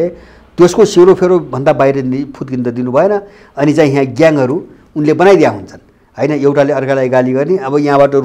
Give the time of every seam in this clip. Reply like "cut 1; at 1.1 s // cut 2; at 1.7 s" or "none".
none